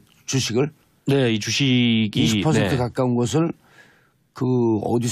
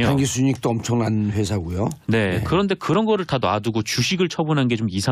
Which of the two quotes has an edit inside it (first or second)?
first